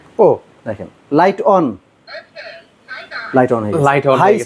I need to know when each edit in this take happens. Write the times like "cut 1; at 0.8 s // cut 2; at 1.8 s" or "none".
none